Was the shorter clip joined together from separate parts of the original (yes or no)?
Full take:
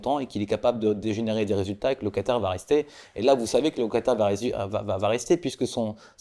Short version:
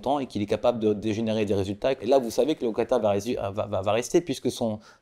yes